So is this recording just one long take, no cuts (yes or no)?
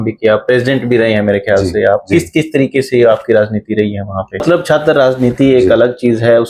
no